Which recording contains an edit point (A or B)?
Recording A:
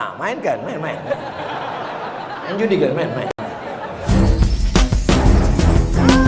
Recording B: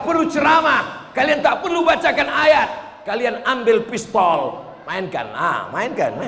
A